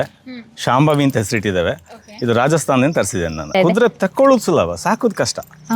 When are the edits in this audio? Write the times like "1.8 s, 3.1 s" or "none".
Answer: 3.5 s